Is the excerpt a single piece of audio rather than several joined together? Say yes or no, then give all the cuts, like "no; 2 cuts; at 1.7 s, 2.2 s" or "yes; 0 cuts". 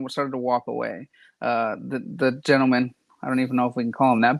yes; 0 cuts